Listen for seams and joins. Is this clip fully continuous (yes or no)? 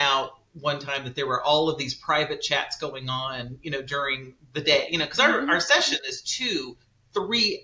yes